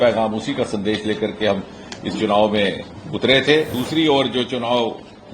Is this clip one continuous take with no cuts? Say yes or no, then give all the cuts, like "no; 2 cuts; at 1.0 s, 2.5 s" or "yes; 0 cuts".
no; 1 cut; at 3.7 s